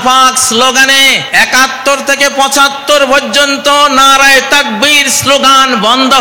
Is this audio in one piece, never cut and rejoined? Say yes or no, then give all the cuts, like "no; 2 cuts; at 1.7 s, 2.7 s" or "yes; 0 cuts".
no; 1 cut; at 1.2 s